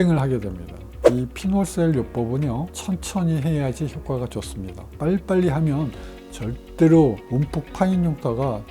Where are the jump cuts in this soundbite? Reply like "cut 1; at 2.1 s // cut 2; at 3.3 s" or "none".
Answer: cut 1; at 1.0 s // cut 2; at 2.7 s